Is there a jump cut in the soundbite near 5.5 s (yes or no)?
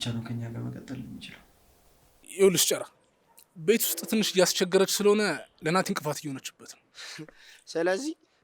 no